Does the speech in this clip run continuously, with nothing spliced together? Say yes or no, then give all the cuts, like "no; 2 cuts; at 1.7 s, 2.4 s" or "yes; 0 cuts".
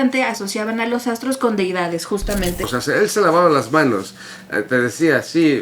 no; 1 cut; at 2.7 s